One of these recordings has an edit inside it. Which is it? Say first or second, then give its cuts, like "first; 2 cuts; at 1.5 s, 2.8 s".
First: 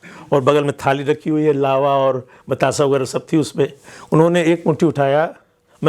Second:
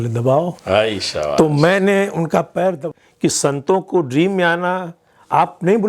second; 1 cut; at 2.9 s